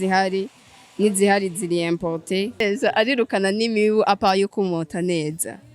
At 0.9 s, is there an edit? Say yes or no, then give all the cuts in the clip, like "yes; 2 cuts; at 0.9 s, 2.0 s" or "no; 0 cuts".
no; 1 cut; at 2.6 s